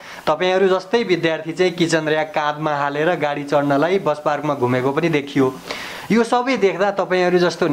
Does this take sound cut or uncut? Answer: uncut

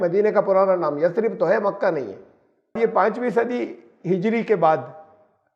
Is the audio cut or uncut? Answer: cut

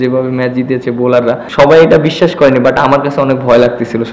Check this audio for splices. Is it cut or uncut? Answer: cut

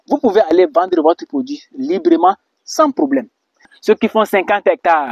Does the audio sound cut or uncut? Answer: cut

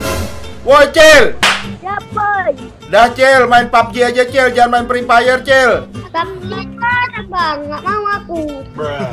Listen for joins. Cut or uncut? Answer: cut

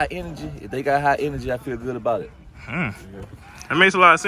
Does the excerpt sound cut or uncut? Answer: uncut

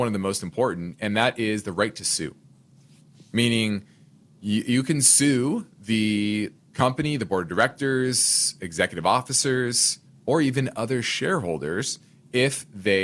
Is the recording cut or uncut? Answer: uncut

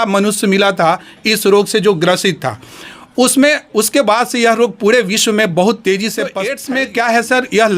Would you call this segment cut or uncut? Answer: cut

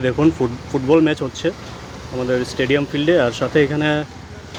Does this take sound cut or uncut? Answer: uncut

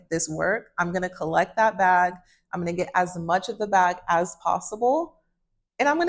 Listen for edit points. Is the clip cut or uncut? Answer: uncut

